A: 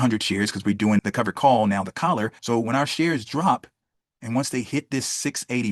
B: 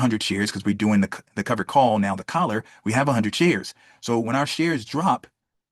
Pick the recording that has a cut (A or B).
A